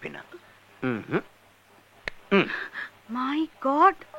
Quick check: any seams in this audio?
no; 0 cuts

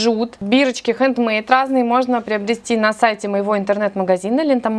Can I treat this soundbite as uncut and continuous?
yes; 0 cuts

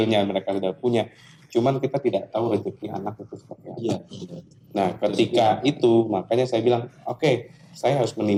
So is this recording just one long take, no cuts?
yes; 0 cuts

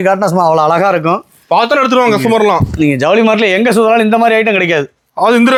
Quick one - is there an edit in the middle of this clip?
no; 0 cuts

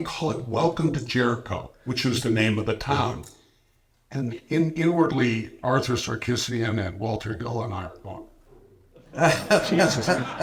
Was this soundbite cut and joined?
no; 0 cuts

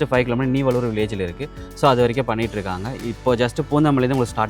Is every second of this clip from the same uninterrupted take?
yes; 0 cuts

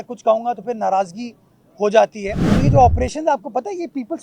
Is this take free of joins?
no; 1 cut; at 2.6 s

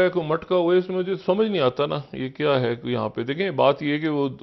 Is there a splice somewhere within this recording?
no; 0 cuts

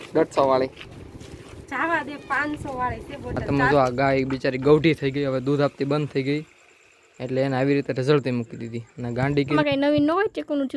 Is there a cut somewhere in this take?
yes; 2 cuts; at 3.4 s, 9.6 s

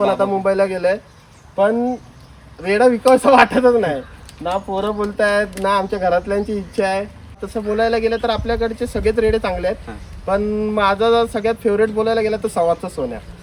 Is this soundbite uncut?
no; 1 cut; at 7.5 s

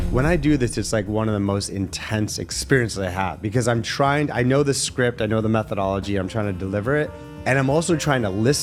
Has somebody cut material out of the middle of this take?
no; 0 cuts

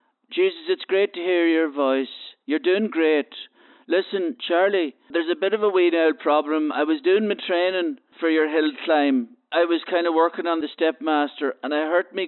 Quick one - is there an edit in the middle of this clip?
yes; 4 cuts; at 5.1 s, 8.1 s, 9.5 s, 10.7 s

